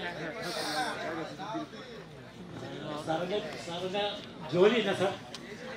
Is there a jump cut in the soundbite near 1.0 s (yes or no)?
no